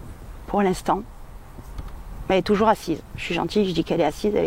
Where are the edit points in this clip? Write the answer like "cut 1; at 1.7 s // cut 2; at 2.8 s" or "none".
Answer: none